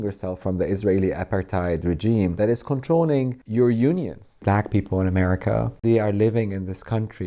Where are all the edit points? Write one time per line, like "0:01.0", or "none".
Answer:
0:02.3
0:03.4
0:04.4